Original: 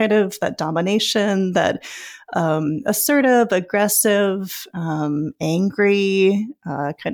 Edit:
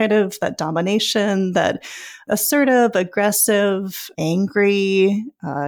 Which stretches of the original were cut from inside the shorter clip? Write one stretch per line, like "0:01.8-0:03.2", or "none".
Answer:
0:02.2-0:02.8
0:04.7-0:05.3